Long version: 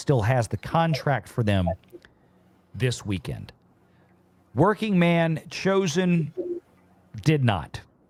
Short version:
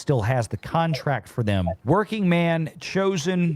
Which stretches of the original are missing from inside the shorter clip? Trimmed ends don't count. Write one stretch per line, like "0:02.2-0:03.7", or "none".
0:01.8-0:04.5